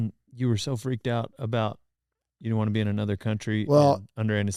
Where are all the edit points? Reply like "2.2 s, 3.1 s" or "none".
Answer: none

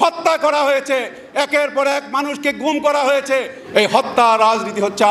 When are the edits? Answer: 3.6 s

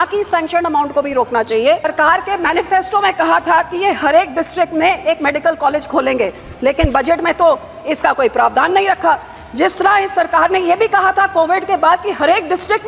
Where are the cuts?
1.9 s

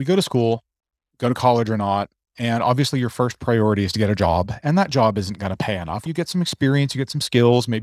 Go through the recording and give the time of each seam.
5.9 s

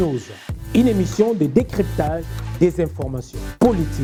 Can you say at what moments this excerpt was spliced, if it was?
none

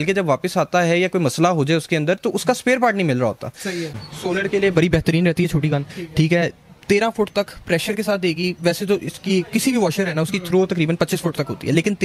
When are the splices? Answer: 4.0 s

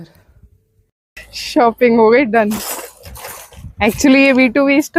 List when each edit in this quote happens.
none

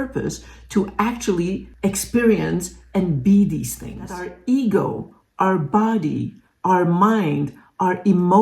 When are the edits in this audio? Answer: 4.3 s

